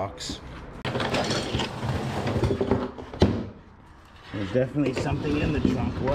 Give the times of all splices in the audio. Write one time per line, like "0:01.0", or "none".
0:01.0